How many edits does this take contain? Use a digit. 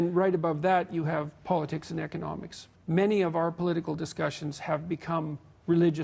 1